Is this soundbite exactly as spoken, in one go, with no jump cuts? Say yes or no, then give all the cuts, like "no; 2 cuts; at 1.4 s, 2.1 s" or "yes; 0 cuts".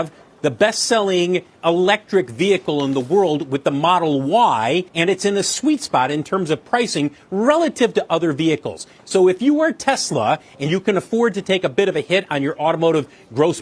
no; 1 cut; at 4.9 s